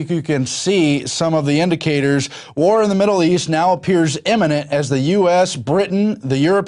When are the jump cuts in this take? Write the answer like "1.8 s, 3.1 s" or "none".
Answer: 1.8 s